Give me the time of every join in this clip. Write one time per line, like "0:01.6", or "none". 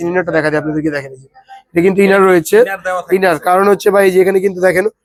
none